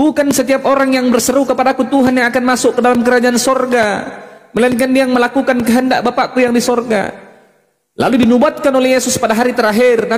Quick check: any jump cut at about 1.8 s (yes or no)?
no